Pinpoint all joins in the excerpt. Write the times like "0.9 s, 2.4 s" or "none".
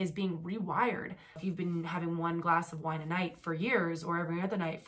1.4 s